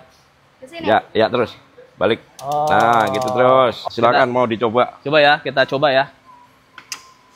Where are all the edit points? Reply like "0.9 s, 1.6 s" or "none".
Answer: 3.8 s